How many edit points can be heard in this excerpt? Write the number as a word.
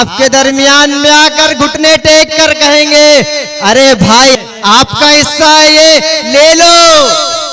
one